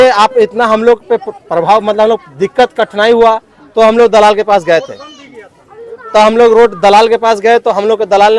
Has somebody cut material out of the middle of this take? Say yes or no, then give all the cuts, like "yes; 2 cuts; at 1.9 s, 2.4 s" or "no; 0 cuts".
no; 0 cuts